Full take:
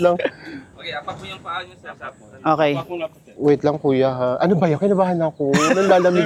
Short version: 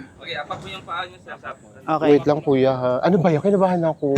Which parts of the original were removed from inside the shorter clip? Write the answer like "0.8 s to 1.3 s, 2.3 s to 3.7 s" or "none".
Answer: 2.6 s to 3.4 s

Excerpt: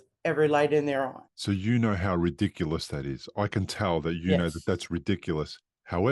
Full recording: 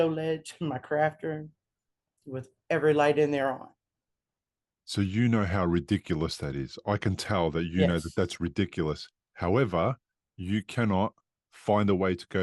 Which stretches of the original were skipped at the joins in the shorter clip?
3.7 s to 4.8 s

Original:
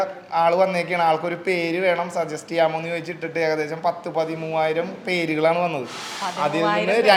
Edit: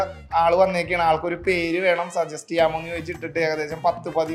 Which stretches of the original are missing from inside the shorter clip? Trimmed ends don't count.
none

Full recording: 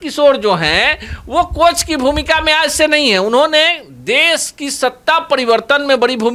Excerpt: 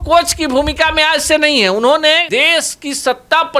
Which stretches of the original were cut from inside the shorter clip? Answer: 3.7 s to 4.0 s

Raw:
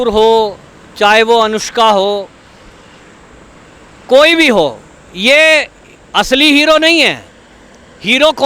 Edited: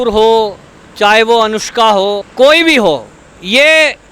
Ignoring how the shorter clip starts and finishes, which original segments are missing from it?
2.3 s to 4.0 s

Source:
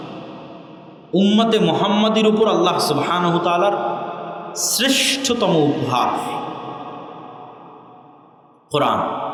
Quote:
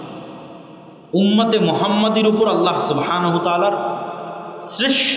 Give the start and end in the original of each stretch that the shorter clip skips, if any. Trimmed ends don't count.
none

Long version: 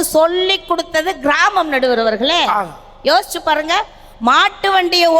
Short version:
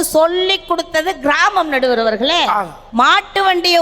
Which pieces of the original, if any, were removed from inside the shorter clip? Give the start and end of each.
2.8 s to 4.1 s

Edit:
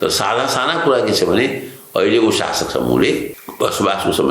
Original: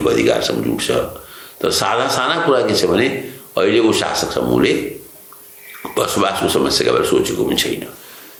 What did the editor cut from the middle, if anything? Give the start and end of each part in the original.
5.0 s to 5.8 s

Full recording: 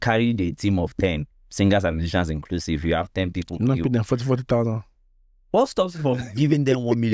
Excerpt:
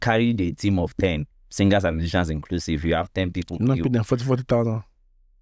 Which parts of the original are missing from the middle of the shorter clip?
none

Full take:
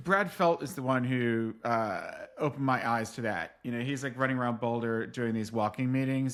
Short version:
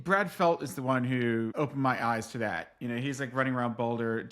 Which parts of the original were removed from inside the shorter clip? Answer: 1.5 s to 2.4 s

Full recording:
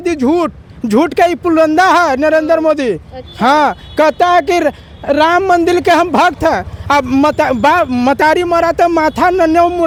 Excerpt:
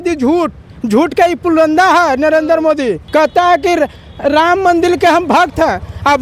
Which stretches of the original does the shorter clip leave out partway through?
3.0 s to 3.9 s

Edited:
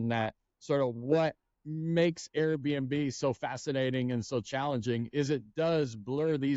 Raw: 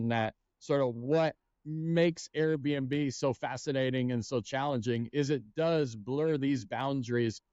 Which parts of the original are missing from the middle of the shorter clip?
none

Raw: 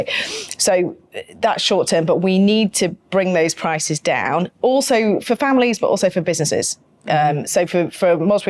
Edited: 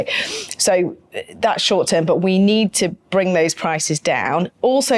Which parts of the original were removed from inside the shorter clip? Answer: none

